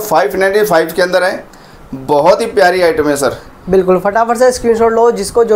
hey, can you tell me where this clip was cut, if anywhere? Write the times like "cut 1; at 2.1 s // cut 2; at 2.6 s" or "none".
none